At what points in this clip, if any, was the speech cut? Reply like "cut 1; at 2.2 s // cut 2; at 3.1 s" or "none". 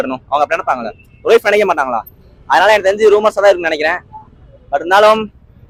none